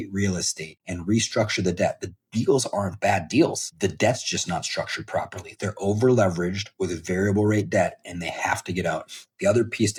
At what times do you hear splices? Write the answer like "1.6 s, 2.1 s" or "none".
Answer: none